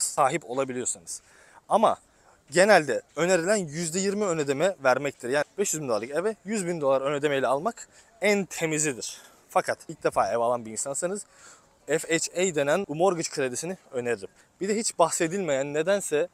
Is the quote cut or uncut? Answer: uncut